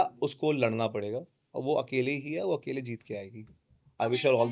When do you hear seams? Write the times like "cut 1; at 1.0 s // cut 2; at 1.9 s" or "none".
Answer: none